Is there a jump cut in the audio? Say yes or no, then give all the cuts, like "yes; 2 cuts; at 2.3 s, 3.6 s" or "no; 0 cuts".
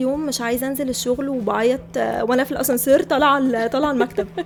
no; 0 cuts